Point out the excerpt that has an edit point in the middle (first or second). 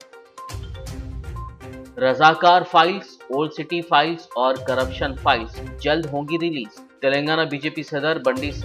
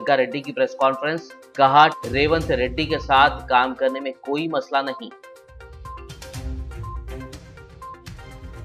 first